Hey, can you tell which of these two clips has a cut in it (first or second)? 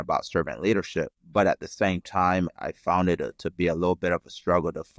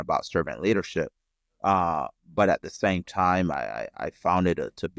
first